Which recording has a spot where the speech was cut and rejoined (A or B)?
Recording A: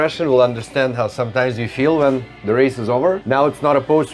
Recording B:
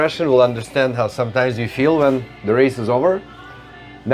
A